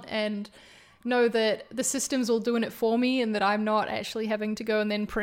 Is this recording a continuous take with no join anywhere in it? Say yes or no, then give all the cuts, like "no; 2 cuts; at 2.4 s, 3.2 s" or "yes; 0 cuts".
yes; 0 cuts